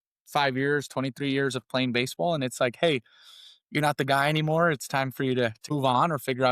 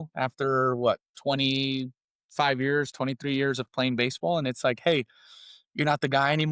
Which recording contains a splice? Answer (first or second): first